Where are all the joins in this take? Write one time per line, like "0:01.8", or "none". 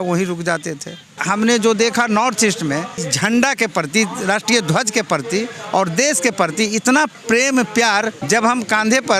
0:01.2
0:03.0
0:07.2
0:08.2

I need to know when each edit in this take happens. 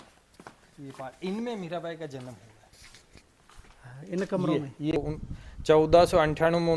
0:05.0

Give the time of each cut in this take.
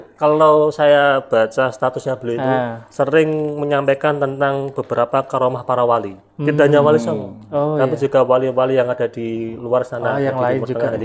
none

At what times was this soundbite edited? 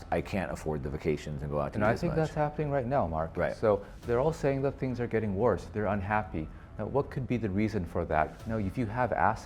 0:03.9
0:08.4

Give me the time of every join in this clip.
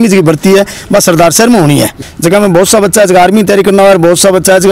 0:02.0

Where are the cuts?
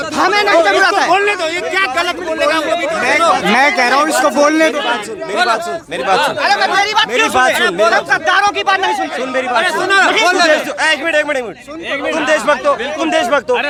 none

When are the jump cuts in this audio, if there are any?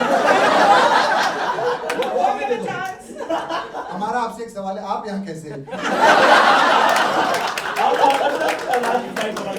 none

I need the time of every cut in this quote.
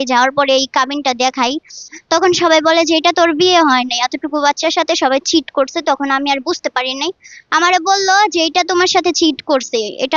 none

